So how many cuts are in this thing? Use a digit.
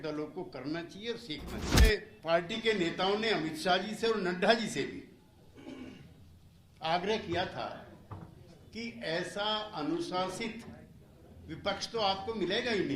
1